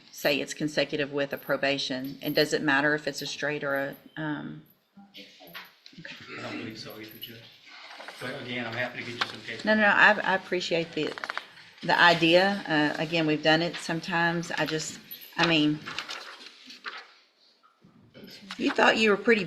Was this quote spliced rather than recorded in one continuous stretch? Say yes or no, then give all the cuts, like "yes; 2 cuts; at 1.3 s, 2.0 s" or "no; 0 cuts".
yes; 1 cut; at 18.5 s